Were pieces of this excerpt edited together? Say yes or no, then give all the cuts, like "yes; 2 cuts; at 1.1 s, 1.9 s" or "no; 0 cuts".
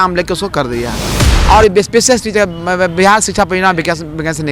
yes; 1 cut; at 1.3 s